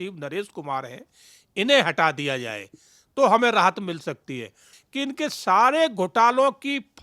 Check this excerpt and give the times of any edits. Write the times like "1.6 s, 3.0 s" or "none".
4.7 s